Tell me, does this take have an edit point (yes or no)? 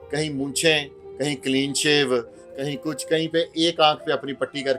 yes